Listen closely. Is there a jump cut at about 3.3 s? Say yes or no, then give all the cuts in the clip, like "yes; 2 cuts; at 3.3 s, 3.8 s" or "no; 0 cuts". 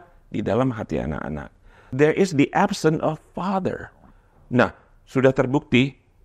no; 1 cut; at 1.8 s